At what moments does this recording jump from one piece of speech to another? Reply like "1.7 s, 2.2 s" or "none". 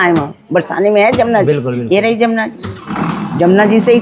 none

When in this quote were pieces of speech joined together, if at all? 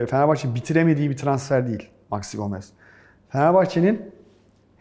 1.9 s

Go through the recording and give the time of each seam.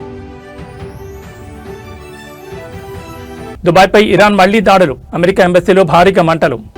3.6 s

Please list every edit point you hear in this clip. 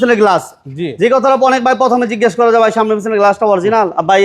none

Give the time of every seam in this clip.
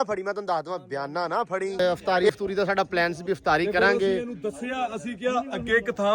1.8 s

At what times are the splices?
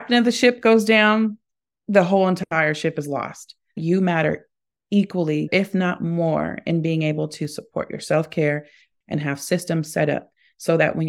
3.8 s, 5.5 s

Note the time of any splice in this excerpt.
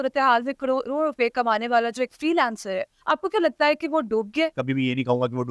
4.6 s

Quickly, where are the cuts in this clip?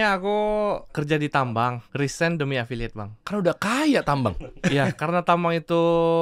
1.0 s, 1.8 s, 3.1 s

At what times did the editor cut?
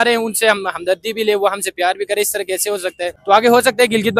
3.1 s

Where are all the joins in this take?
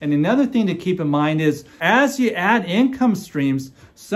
1.7 s

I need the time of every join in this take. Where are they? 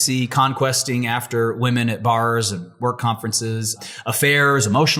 3.8 s

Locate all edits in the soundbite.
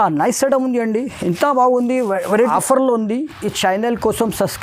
2.5 s

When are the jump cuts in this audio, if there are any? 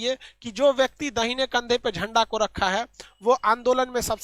none

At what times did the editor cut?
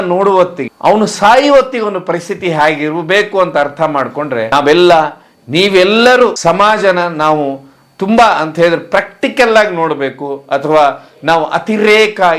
none

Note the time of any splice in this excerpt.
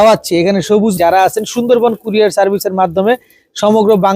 1.0 s

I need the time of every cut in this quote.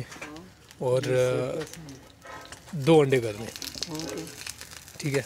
none

